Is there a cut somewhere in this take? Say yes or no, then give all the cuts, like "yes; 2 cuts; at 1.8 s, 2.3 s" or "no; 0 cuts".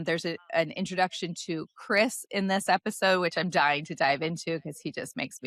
no; 0 cuts